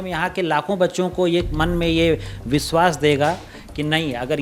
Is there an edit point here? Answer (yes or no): no